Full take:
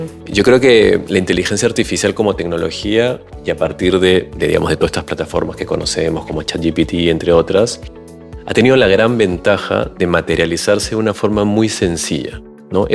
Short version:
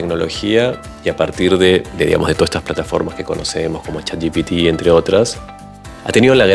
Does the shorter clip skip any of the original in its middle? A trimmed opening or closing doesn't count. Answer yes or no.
no